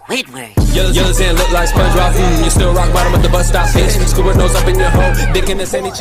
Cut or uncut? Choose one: uncut